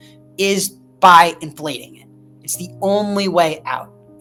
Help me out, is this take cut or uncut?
uncut